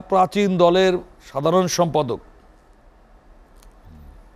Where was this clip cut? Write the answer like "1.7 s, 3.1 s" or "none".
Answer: none